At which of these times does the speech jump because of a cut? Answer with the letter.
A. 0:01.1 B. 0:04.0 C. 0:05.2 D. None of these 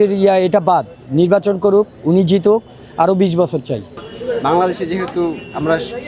B